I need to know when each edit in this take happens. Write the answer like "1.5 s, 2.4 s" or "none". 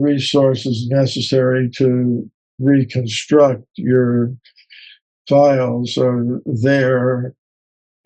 none